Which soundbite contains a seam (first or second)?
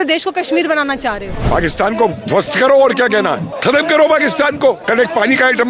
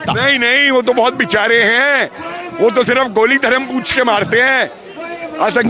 first